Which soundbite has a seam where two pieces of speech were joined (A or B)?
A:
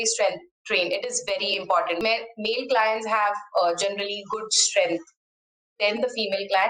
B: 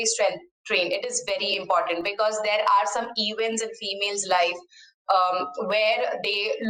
A